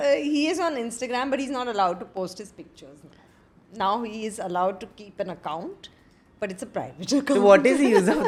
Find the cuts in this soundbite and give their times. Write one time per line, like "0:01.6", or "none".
none